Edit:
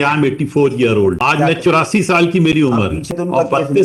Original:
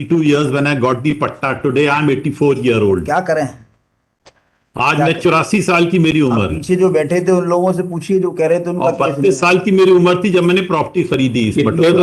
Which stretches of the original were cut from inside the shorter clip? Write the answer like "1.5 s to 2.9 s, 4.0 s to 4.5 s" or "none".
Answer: 3.0 s to 4.8 s, 6.7 s to 8.6 s